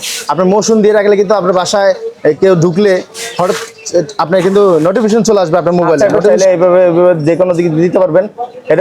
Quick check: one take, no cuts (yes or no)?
no